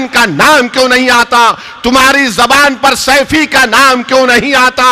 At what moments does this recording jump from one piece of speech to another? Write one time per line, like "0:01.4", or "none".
none